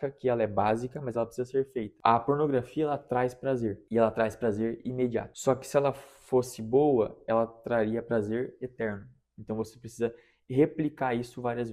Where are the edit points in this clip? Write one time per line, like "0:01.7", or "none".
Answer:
none